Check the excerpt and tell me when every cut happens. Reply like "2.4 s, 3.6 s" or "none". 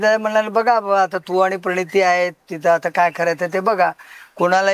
none